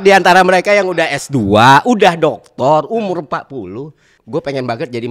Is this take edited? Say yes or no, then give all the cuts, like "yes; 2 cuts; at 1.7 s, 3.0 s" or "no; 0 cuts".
yes; 1 cut; at 4.1 s